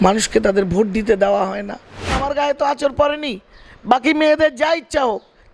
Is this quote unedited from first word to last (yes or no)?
no